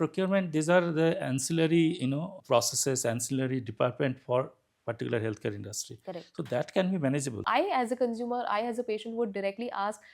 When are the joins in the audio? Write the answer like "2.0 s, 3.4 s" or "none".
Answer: 7.4 s